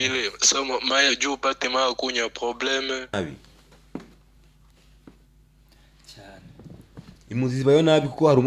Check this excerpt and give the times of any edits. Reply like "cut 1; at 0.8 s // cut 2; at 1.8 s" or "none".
cut 1; at 3.1 s